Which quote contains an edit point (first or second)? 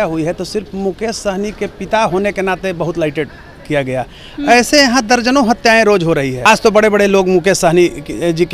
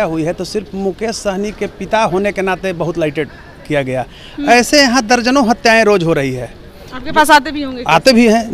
first